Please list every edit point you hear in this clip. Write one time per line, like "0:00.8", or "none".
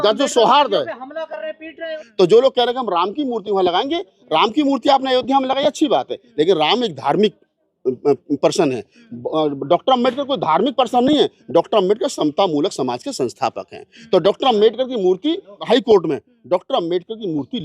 0:01.9
0:15.6

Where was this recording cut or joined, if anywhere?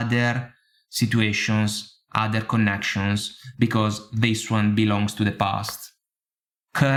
none

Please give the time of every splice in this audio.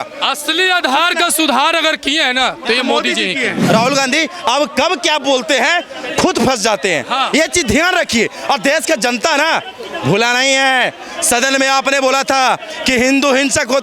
0:03.6

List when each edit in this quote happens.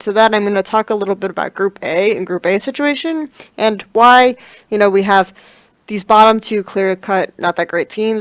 none

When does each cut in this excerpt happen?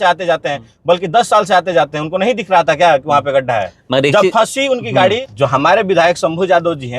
0:05.3

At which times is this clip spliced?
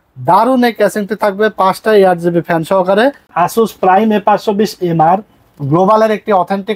0:03.2

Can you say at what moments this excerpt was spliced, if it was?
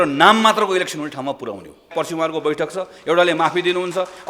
0:01.9

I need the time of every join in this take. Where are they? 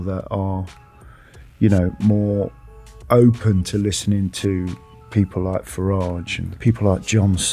0:06.5

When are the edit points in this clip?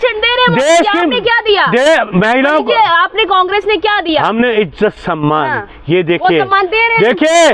none

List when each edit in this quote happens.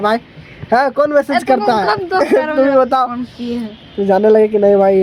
none

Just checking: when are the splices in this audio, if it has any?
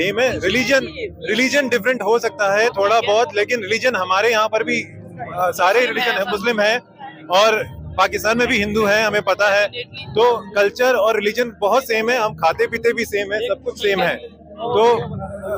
none

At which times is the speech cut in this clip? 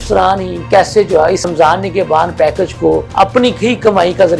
0:01.5
0:03.1

